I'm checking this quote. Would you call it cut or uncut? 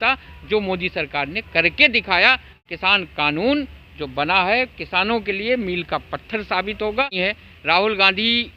cut